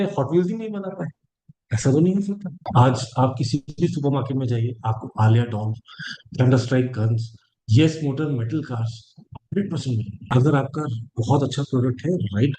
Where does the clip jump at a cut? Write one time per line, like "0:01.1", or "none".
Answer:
0:02.7
0:10.3

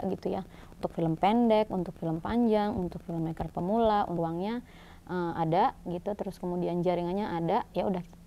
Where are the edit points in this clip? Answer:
0:04.1

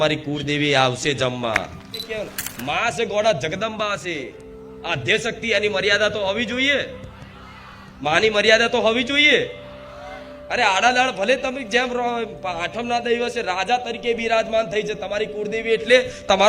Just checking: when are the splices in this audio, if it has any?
0:02.1

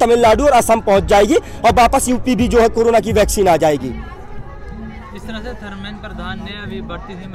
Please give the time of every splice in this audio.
none

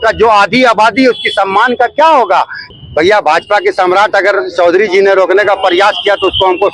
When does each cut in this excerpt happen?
0:02.6

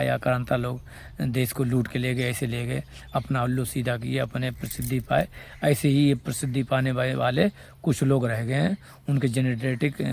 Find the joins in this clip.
none

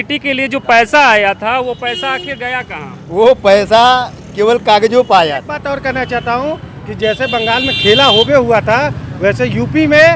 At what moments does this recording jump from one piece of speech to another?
0:05.6

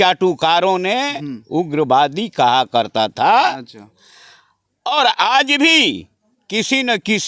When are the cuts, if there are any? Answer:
none

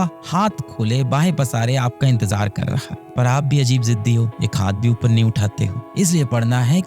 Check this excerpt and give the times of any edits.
0:05.8

